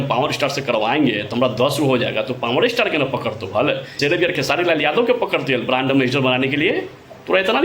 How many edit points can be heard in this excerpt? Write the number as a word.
one